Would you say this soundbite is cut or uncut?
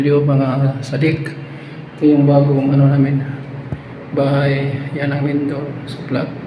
uncut